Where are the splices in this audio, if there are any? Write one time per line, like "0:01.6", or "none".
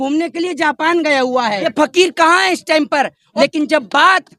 0:01.7
0:03.2